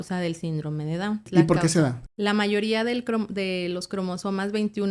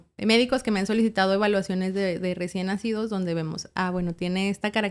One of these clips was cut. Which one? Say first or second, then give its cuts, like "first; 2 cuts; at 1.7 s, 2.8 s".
first; 2 cuts; at 1.2 s, 2.0 s